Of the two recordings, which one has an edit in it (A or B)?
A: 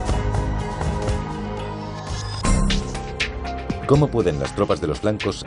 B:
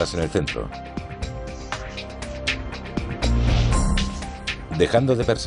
B